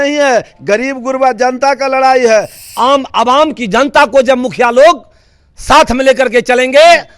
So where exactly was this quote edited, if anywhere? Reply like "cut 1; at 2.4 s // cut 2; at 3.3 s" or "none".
cut 1; at 2.6 s